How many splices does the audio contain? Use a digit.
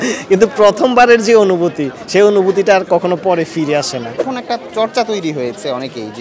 1